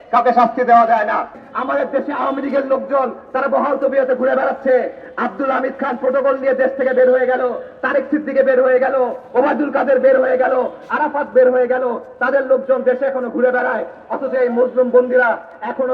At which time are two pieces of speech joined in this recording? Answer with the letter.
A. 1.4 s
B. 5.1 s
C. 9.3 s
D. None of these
A